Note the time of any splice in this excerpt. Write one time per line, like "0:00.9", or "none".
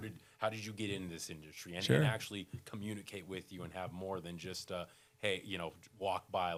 none